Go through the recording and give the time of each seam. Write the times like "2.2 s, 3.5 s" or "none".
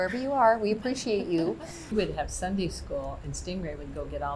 none